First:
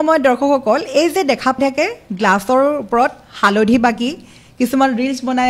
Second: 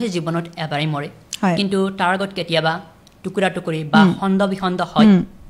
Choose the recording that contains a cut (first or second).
first